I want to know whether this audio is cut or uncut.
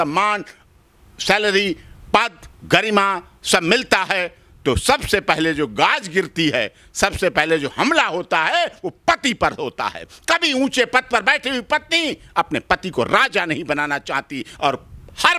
uncut